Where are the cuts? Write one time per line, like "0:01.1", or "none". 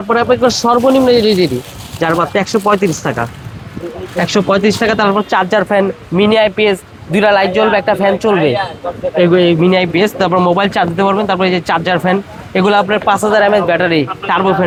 none